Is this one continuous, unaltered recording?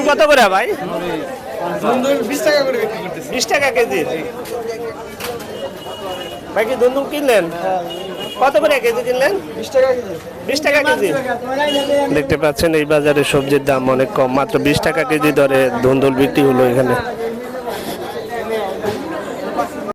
yes; 0 cuts

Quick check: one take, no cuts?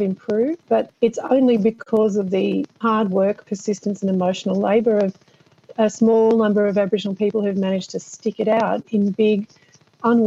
no; 2 cuts; at 0.9 s, 2.8 s

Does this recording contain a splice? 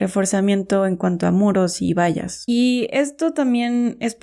yes; 1 cut; at 2.3 s

